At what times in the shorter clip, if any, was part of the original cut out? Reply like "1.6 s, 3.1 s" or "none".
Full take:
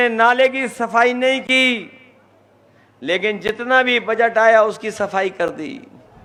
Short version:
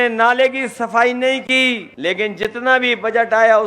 1.9 s